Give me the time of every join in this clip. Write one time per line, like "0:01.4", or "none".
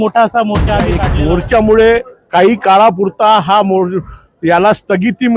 0:01.0